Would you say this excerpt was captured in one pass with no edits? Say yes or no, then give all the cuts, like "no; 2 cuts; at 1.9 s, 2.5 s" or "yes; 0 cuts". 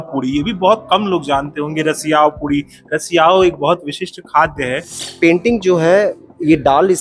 no; 1 cut; at 4.9 s